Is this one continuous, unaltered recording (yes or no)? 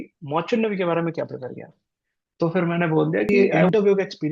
no